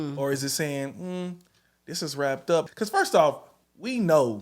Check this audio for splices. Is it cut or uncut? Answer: cut